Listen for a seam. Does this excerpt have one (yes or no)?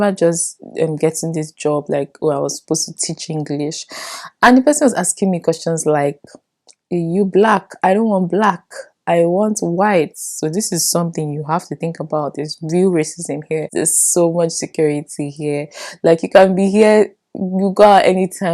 yes